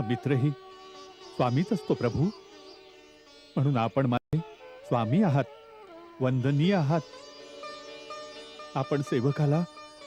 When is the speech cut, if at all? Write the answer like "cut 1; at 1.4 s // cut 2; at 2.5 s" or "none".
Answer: none